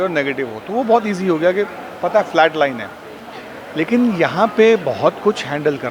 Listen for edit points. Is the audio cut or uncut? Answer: uncut